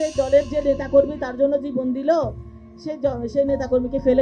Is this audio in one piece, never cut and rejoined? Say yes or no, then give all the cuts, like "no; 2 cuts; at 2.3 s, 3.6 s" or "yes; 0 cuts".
yes; 0 cuts